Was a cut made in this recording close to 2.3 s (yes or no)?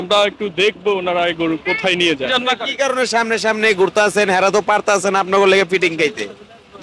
yes